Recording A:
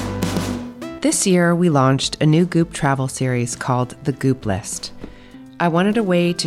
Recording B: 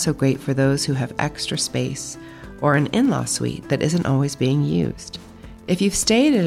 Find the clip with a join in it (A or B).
A